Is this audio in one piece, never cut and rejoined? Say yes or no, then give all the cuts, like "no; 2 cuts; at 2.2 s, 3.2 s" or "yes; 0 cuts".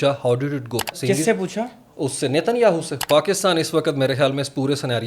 no; 2 cuts; at 0.9 s, 3.0 s